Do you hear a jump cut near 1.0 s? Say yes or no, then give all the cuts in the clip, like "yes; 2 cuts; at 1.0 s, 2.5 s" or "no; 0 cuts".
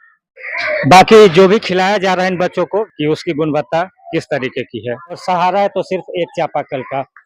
no; 2 cuts; at 2.9 s, 5.2 s